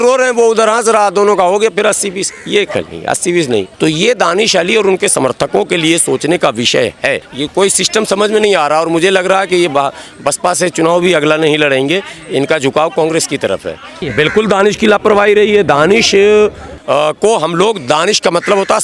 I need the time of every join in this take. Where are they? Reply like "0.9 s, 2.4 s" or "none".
3.7 s, 7.3 s, 14.0 s